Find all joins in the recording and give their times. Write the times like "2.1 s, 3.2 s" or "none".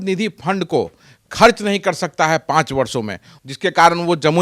3.3 s